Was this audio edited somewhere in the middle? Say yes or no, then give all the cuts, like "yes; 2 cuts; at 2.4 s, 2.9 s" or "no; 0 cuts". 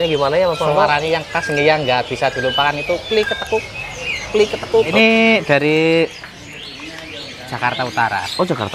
yes; 1 cut; at 4.9 s